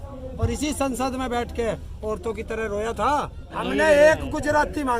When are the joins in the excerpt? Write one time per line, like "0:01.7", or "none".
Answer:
0:03.5